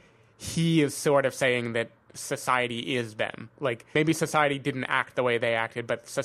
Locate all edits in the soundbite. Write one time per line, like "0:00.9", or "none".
0:03.9